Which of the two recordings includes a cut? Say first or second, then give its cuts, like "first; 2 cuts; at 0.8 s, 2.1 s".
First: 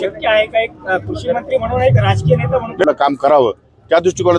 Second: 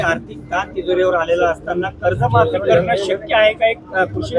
first; 1 cut; at 2.8 s